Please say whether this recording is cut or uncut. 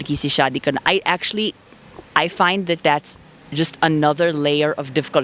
uncut